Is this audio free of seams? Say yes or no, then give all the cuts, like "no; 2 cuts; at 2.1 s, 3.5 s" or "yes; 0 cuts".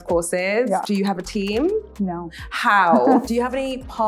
no; 3 cuts; at 0.8 s, 1.9 s, 3.2 s